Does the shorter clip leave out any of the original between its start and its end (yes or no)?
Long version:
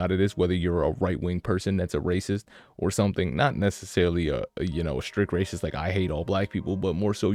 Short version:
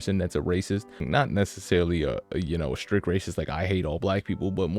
yes